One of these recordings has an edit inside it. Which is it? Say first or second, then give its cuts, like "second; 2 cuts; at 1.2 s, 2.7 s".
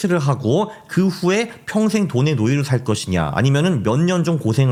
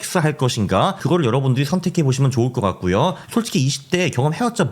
second; 2 cuts; at 1.0 s, 3.2 s